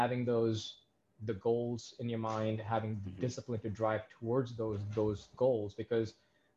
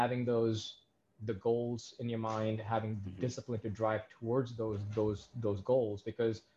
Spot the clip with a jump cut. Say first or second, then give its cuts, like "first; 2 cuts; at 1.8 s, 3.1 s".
first; 1 cut; at 5.3 s